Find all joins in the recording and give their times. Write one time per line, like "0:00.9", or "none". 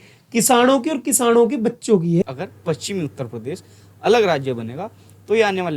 0:02.2